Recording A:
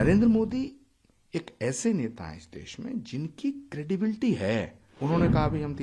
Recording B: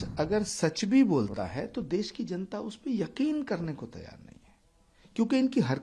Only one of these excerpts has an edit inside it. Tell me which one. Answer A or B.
A